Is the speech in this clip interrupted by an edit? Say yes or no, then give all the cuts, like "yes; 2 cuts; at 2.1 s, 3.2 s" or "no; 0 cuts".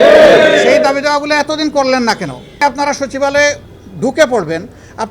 yes; 1 cut; at 2.6 s